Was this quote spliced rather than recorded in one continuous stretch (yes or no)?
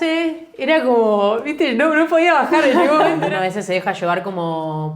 yes